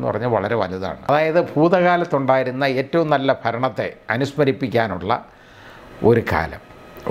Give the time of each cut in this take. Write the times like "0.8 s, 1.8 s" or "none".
1.1 s